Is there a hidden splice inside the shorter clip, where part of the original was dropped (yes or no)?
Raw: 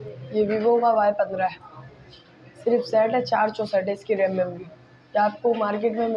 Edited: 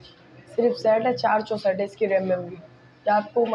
no